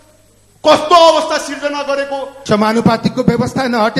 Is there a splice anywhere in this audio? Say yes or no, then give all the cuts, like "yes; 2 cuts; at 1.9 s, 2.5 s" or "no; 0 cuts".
yes; 1 cut; at 2.3 s